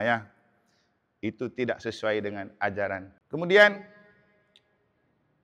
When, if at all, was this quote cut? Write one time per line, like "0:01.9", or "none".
0:03.1